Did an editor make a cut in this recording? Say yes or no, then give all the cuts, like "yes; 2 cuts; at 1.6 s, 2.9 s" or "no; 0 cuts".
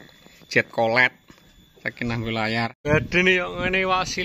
yes; 1 cut; at 2.8 s